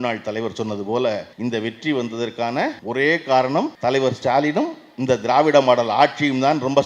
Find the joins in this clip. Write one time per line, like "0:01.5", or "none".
0:01.3
0:02.8
0:03.7